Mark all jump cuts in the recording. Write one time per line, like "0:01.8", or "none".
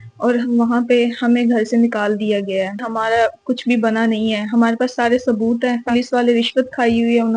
0:02.9
0:05.9